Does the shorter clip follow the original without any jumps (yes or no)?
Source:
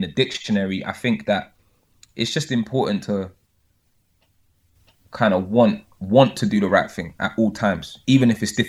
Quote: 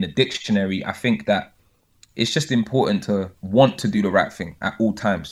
no